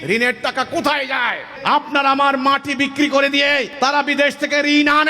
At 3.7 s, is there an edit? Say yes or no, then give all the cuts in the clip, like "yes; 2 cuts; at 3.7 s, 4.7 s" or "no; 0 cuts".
yes; 2 cuts; at 1.5 s, 3.7 s